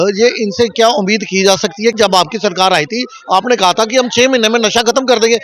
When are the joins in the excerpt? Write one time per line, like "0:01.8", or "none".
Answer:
0:02.0